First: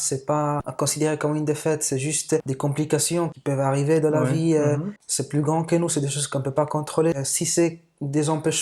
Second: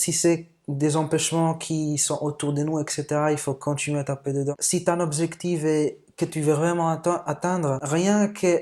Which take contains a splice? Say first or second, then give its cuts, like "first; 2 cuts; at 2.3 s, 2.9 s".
second; 1 cut; at 4.6 s